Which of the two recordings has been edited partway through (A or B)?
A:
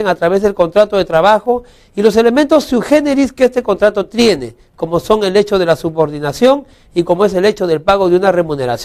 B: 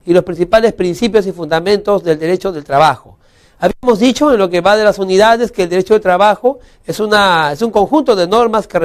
B